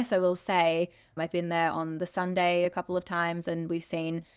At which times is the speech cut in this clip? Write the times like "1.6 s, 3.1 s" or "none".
1.0 s, 2.7 s